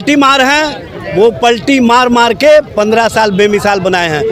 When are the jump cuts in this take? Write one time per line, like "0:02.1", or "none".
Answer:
none

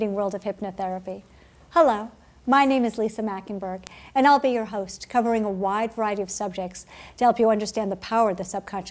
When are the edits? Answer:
none

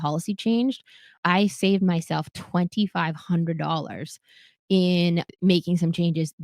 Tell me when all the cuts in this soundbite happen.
0:01.2
0:05.3

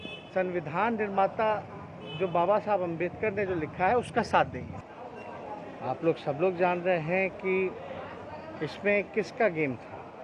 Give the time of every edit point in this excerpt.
0:04.6

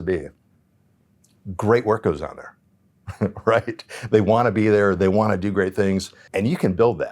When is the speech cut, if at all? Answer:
0:06.2

